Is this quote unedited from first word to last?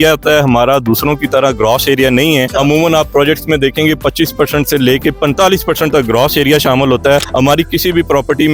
yes; 0 cuts

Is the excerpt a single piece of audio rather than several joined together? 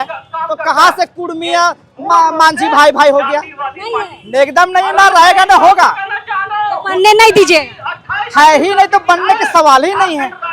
yes; 0 cuts

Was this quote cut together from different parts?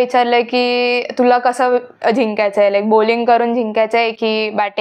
no; 0 cuts

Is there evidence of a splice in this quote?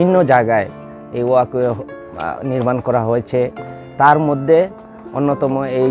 no; 0 cuts

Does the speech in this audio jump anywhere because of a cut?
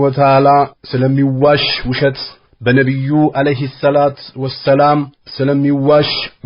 yes; 1 cut; at 5.2 s

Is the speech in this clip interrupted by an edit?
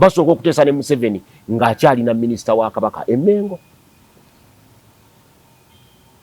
no; 0 cuts

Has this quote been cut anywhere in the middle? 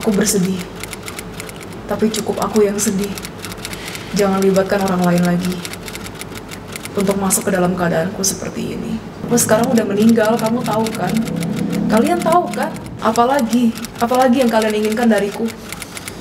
yes; 1 cut; at 9.2 s

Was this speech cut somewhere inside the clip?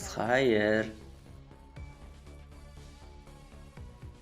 yes; 1 cut; at 1.0 s

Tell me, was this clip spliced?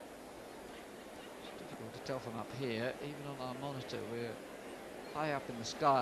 no; 0 cuts

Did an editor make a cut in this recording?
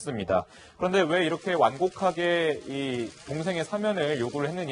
yes; 1 cut; at 2.8 s

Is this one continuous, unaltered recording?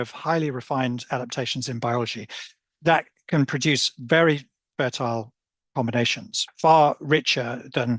no; 1 cut; at 6.4 s

